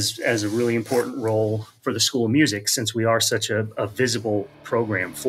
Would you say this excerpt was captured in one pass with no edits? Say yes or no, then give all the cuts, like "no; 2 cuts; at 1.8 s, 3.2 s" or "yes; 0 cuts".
yes; 0 cuts